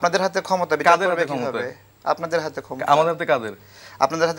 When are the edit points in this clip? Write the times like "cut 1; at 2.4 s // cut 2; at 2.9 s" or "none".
none